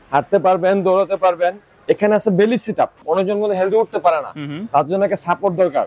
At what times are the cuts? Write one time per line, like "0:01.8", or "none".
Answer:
0:01.8
0:03.0